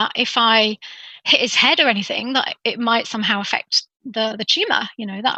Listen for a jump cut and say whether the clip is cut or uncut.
uncut